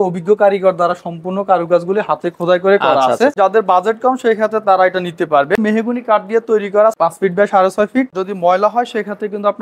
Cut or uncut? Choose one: cut